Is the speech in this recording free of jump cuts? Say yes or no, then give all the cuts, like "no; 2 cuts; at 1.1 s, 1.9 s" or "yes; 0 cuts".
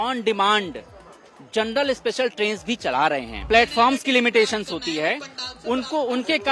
no; 1 cut; at 3.3 s